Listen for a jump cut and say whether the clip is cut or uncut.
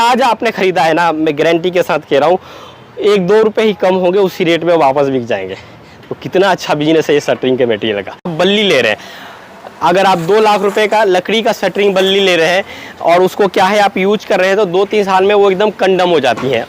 cut